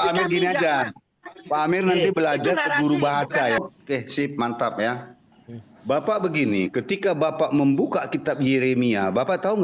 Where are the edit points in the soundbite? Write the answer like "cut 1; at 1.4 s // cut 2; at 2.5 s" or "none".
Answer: cut 1; at 3.6 s